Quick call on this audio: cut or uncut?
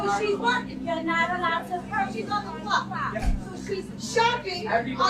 uncut